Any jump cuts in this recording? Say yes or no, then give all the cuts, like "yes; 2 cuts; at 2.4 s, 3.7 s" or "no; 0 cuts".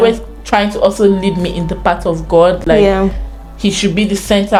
no; 0 cuts